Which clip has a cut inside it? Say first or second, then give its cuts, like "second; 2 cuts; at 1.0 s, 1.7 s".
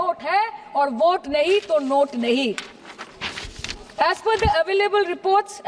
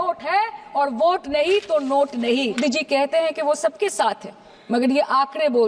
second; 1 cut; at 2.6 s